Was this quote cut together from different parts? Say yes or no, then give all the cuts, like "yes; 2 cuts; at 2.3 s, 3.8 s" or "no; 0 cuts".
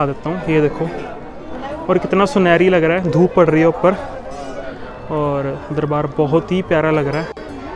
no; 0 cuts